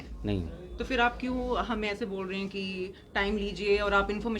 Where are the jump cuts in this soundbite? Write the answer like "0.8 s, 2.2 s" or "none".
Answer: none